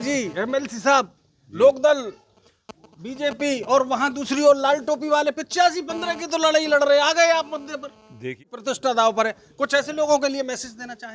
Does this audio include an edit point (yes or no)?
yes